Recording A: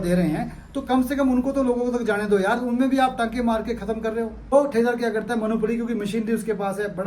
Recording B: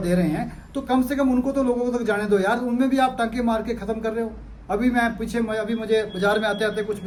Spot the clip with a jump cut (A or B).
A